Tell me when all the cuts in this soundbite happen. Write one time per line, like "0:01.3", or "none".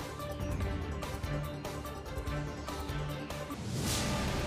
0:03.5